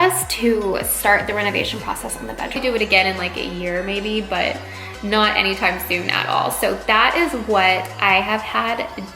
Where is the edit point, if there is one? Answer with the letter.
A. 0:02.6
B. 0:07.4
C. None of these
A